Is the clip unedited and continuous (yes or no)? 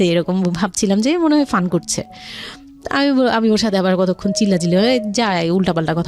yes